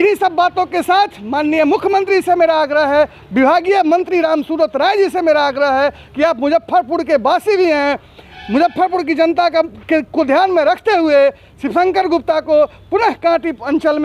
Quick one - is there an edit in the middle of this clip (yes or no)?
no